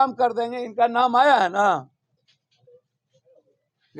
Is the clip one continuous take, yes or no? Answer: yes